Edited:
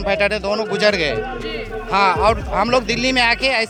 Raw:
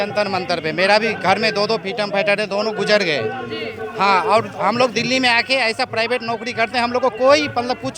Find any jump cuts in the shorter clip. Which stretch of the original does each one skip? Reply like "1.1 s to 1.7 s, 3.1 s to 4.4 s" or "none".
none